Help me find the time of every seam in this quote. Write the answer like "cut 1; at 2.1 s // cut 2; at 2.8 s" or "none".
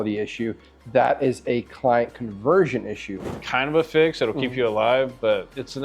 cut 1; at 3.4 s